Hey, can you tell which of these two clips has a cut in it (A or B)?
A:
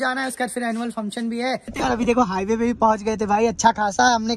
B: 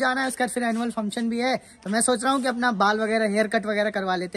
A